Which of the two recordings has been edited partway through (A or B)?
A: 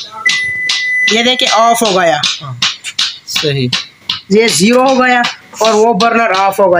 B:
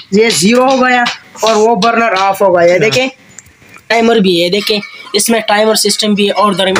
B